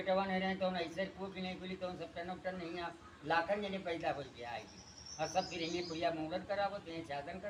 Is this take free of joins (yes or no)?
yes